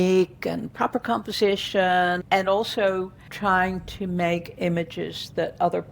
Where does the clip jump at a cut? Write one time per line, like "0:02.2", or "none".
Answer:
0:02.2